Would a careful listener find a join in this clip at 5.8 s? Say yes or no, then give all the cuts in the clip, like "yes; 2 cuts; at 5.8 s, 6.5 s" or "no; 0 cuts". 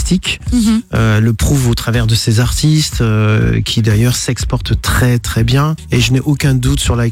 yes; 1 cut; at 5.8 s